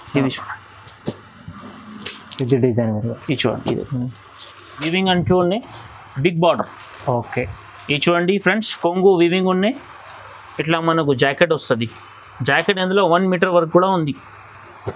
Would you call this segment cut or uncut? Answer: cut